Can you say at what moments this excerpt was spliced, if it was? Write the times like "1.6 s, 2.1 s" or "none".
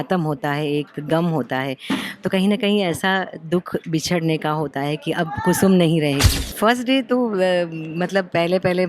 6.4 s